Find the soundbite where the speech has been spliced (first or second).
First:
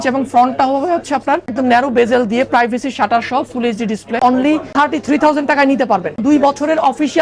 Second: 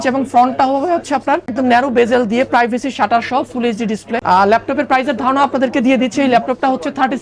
first